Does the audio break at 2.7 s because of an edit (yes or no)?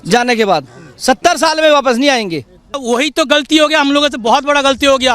yes